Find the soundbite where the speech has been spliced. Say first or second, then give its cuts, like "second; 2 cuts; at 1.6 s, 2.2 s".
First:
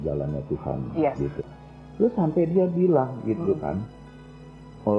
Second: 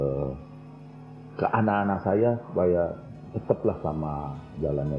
first; 1 cut; at 1.4 s